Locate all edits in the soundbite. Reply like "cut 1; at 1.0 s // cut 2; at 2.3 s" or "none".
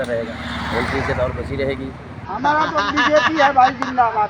cut 1; at 2.2 s

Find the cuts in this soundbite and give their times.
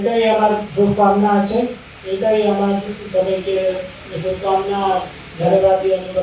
none

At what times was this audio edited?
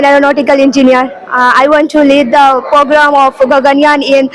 cut 1; at 1.2 s

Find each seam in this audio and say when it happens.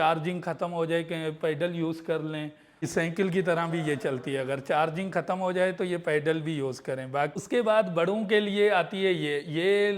cut 1; at 2.8 s // cut 2; at 7.4 s

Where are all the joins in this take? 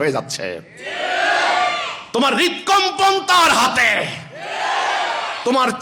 none

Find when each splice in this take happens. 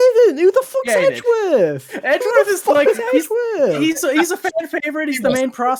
none

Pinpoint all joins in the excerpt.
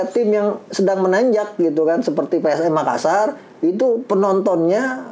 none

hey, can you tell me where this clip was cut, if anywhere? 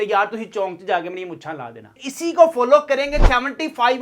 cut 1; at 2.0 s

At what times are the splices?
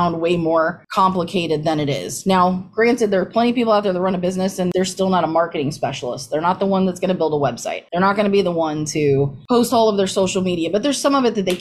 cut 1; at 4.7 s

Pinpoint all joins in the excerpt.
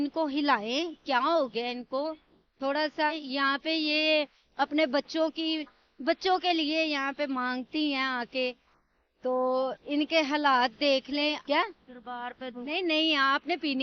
cut 1; at 3.2 s // cut 2; at 12.5 s

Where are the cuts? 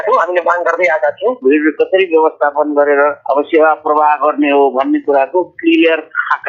cut 1; at 1.4 s

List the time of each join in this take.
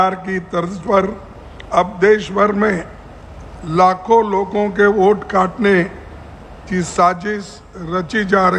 none

